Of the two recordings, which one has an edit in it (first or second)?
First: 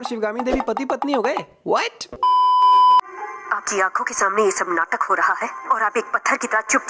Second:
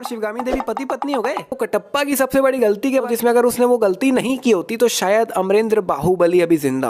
second